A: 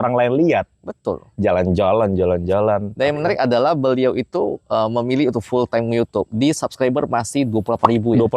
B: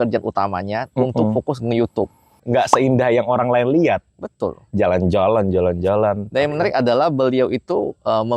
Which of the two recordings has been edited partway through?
B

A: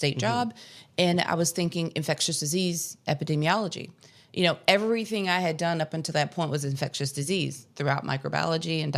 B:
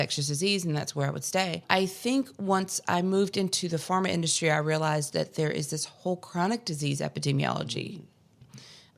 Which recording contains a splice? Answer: B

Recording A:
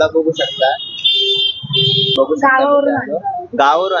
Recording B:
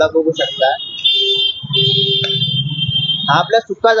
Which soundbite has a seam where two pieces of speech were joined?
A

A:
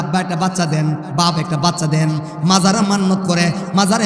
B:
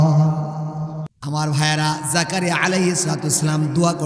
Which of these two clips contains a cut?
B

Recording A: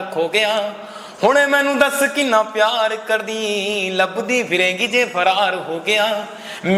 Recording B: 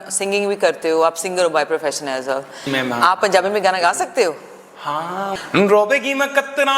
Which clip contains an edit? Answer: B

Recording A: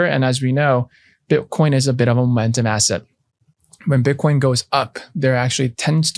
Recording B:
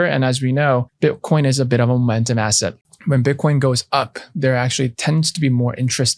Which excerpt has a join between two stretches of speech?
B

